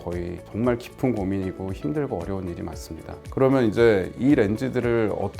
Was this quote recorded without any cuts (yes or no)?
no